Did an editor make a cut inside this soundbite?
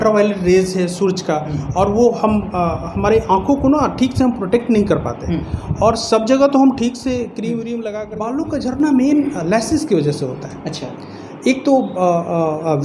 yes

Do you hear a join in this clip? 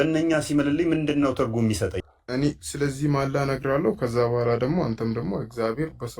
yes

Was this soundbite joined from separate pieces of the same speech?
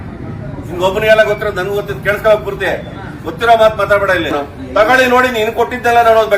yes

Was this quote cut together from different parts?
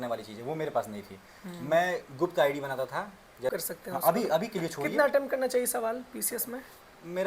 yes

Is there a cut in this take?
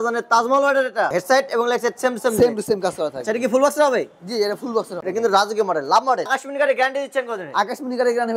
yes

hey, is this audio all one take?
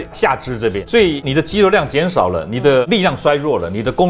no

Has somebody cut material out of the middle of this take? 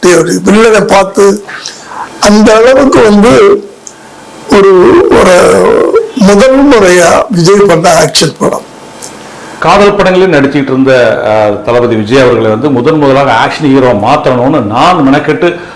yes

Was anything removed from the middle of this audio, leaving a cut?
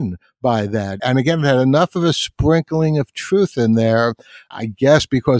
yes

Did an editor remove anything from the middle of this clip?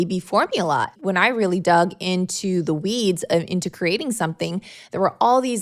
yes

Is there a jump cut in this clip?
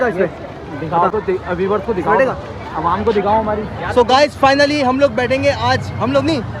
no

